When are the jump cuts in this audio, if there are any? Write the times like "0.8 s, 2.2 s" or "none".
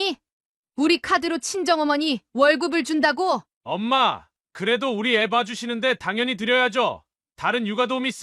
3.5 s